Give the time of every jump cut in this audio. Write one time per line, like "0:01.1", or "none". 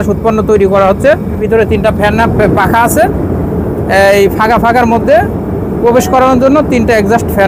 0:01.4